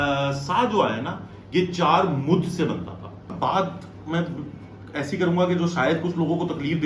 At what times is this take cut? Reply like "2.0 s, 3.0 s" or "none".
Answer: 3.3 s